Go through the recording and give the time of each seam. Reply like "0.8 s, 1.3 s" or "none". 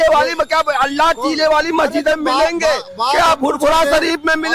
none